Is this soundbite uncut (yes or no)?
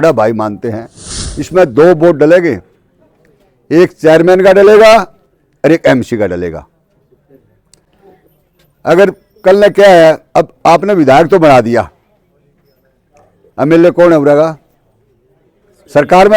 no